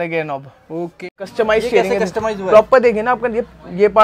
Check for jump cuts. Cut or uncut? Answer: cut